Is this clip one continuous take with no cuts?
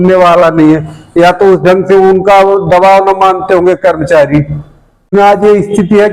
no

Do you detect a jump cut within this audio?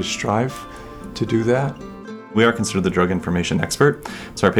yes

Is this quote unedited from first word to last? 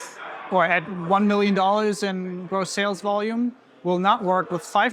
yes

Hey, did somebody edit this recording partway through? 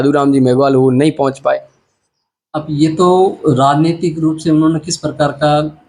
no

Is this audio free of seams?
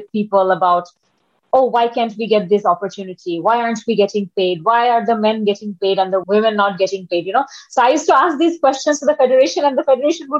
no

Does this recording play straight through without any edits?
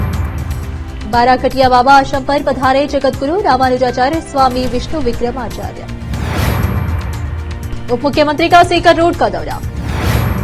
yes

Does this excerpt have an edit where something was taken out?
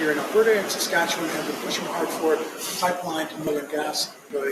yes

